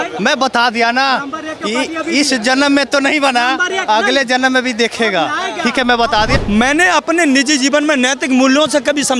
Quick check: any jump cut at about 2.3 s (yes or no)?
no